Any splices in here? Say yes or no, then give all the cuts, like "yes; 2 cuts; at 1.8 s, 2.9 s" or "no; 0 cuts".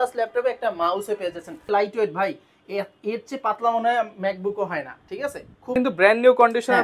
yes; 2 cuts; at 1.7 s, 5.7 s